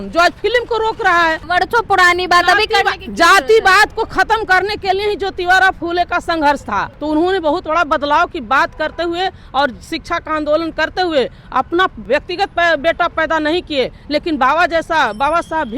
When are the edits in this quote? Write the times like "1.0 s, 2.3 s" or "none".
1.4 s, 6.9 s, 12.0 s